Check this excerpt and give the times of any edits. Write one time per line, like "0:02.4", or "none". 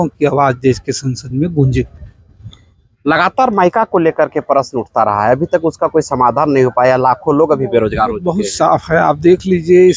none